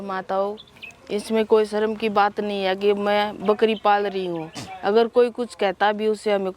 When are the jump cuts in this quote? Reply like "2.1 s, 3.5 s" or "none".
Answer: none